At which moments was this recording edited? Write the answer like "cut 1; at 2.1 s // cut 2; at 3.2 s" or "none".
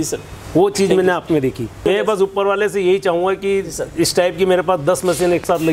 cut 1; at 1.8 s